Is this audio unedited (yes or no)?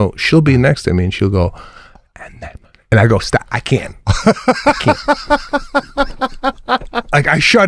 yes